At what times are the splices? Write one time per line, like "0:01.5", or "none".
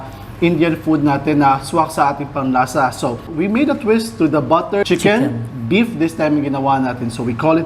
0:03.2
0:04.8